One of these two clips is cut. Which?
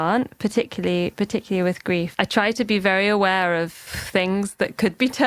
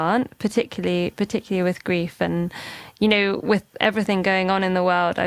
first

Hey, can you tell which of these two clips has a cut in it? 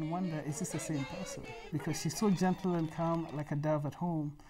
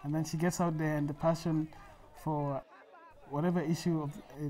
second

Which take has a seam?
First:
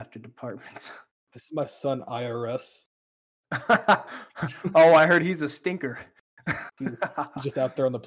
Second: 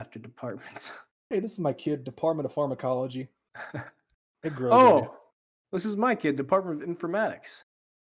first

